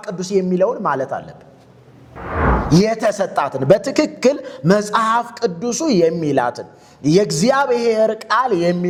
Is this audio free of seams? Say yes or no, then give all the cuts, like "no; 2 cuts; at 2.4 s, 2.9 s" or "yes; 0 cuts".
yes; 0 cuts